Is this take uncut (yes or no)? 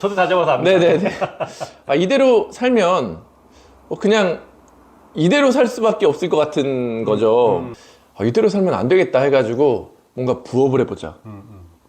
no